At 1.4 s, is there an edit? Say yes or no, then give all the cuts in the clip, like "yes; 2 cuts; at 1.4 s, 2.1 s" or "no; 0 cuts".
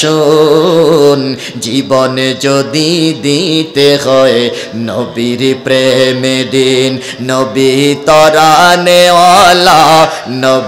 no; 0 cuts